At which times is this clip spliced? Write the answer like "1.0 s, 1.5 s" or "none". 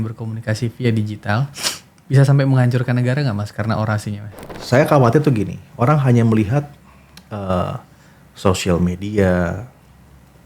4.5 s